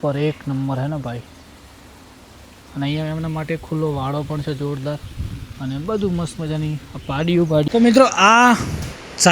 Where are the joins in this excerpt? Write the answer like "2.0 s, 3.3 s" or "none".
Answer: 7.7 s